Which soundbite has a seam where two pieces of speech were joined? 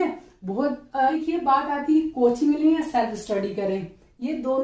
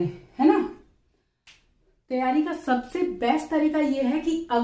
first; 1 cut; at 1.1 s

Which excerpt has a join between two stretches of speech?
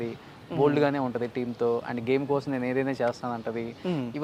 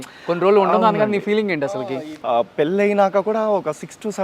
second; 1 cut; at 1.7 s

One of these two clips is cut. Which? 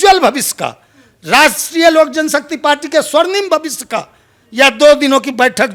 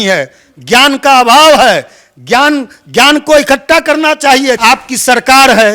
second; 1 cut; at 4.6 s

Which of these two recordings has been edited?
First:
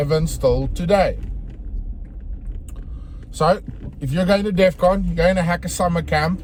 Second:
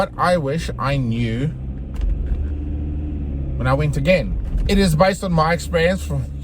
second; 1 cut; at 4.4 s

